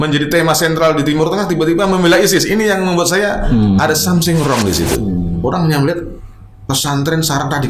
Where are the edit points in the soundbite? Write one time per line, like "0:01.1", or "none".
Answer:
0:05.1